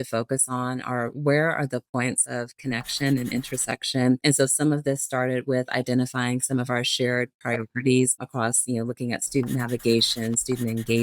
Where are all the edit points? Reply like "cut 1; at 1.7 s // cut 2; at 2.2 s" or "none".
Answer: cut 1; at 4.2 s // cut 2; at 8.3 s